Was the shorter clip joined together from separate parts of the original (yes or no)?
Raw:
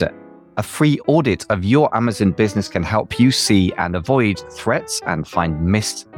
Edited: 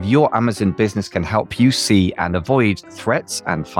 no